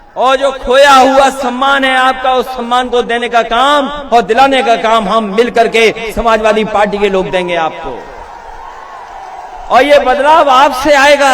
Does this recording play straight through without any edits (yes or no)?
yes